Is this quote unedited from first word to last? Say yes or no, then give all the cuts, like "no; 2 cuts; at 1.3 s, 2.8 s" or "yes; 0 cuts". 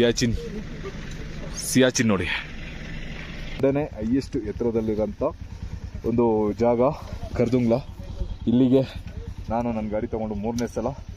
no; 1 cut; at 3.6 s